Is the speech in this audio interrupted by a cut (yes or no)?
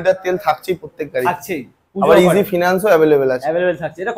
no